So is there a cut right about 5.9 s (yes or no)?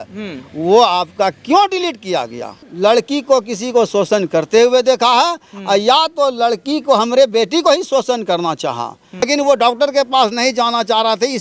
no